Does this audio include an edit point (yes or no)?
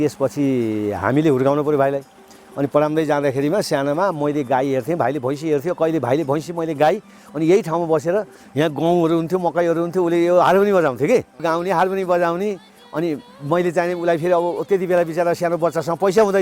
yes